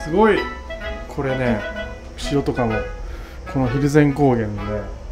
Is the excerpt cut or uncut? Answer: uncut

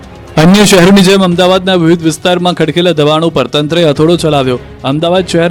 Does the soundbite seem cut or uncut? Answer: uncut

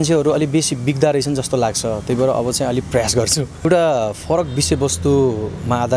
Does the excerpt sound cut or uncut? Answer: cut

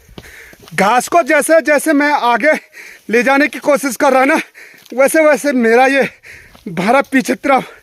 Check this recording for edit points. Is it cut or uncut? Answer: uncut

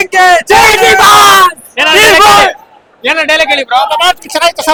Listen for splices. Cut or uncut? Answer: uncut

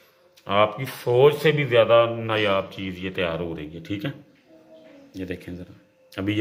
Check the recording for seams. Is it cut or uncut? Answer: uncut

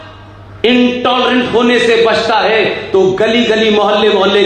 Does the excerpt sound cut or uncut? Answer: uncut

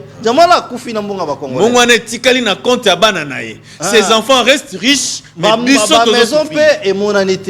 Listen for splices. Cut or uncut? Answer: uncut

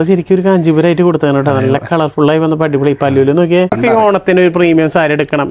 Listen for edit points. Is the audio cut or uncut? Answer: cut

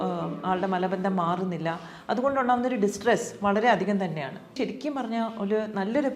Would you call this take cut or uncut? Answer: cut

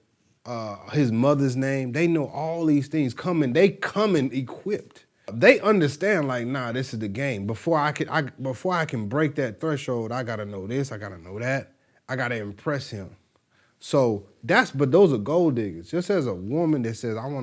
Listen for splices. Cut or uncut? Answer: cut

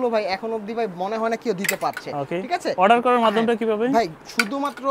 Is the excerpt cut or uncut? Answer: uncut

